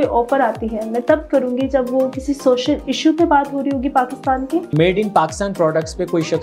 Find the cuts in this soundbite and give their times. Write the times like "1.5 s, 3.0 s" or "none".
4.7 s